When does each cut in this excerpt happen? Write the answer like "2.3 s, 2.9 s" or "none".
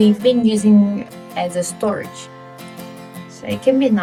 none

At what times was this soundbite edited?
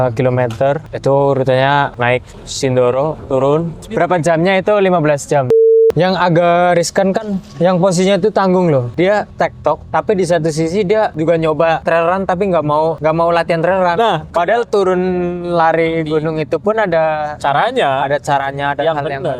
0.9 s, 1.9 s, 3.8 s, 5.7 s, 9.2 s, 11.1 s, 11.8 s, 13.0 s, 14.3 s

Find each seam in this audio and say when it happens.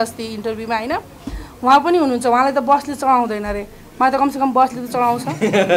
none

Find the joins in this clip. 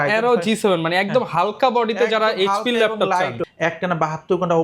3.3 s

